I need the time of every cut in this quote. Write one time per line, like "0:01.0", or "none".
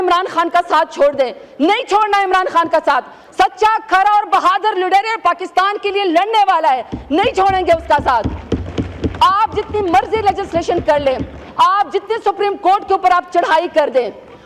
none